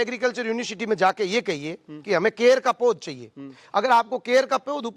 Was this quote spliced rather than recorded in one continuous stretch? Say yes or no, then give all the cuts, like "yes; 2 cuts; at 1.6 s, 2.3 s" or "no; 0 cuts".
no; 0 cuts